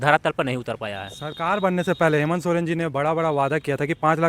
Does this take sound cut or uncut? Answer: uncut